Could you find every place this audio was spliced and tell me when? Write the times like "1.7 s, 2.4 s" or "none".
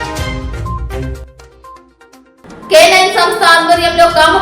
1.8 s